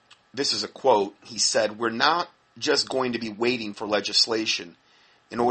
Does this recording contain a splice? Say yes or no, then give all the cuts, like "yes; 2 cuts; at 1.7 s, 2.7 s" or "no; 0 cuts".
yes; 1 cut; at 1.7 s